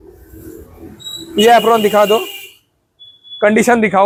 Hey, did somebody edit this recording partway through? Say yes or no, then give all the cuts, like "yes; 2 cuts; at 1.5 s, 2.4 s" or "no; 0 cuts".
no; 0 cuts